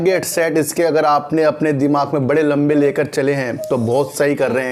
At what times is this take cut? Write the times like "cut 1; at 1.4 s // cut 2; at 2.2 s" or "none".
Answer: none